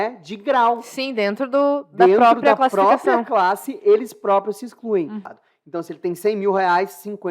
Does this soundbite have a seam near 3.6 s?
no; 1 cut; at 5.3 s

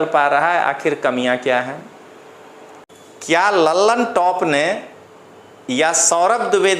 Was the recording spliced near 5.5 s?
no; 1 cut; at 2.9 s

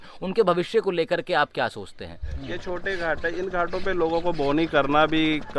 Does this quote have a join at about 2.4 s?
yes; 1 cut; at 2.4 s

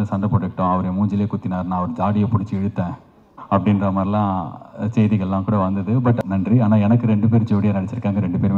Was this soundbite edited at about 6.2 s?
yes; 1 cut; at 6.2 s

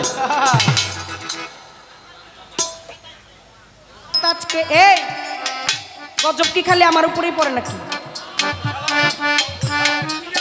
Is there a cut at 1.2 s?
no; 1 cut; at 4.2 s

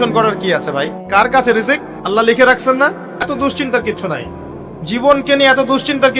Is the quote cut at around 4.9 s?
no; 3 cuts; at 1.0 s, 1.9 s, 3.3 s

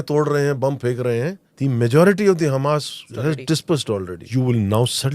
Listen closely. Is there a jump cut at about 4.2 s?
yes; 3 cuts; at 1.4 s, 3.0 s, 4.2 s

